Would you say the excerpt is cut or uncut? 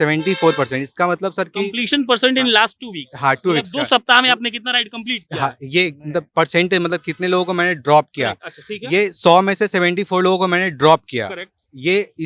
uncut